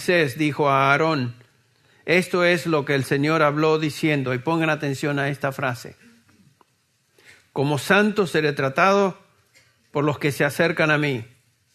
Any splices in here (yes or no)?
yes